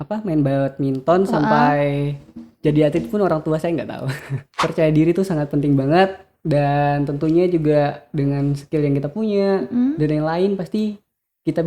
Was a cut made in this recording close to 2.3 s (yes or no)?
no